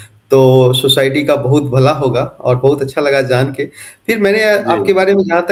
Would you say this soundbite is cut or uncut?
uncut